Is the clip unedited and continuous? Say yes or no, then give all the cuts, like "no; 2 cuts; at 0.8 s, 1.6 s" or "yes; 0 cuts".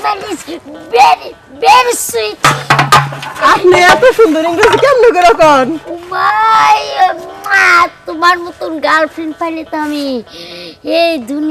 yes; 0 cuts